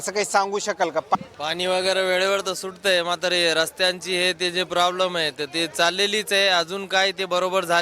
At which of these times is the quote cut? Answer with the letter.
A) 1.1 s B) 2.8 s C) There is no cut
A